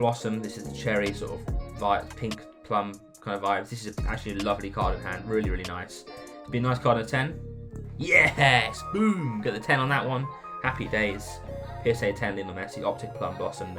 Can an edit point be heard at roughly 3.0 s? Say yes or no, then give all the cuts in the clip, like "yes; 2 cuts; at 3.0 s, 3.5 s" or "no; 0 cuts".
no; 0 cuts